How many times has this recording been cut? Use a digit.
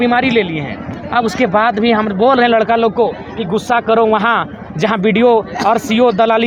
0